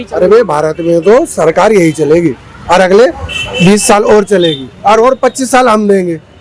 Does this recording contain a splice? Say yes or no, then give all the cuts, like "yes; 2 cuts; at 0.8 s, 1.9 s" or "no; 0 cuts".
yes; 1 cut; at 4.7 s